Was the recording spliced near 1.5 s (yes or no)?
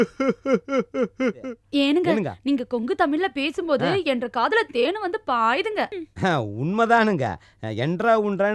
yes